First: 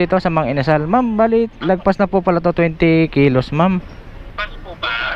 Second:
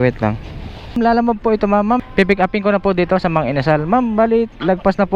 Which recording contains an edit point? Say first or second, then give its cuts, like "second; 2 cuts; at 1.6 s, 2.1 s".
second; 1 cut; at 1.0 s